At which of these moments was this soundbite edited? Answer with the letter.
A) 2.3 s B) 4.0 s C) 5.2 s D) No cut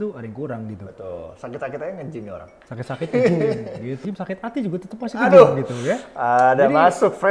B